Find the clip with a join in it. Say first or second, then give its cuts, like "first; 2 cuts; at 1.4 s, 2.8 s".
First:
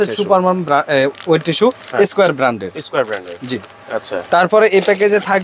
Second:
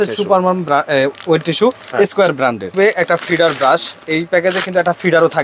second; 1 cut; at 2.7 s